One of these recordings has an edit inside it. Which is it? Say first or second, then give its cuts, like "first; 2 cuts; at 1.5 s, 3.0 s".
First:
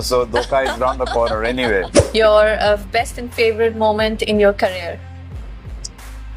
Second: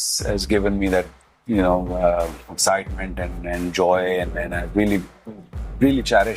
first; 1 cut; at 2.0 s